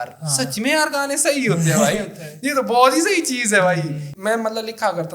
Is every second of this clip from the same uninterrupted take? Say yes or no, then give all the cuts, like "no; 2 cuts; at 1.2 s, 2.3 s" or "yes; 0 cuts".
no; 1 cut; at 4.1 s